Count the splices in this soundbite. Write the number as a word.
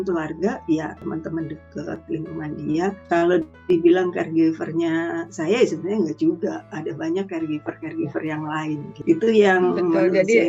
three